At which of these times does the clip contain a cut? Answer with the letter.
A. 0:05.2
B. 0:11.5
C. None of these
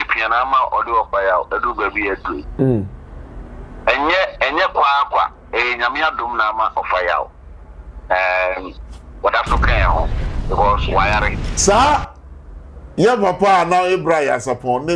B